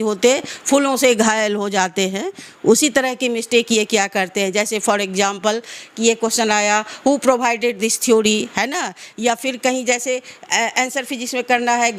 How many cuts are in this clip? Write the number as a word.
zero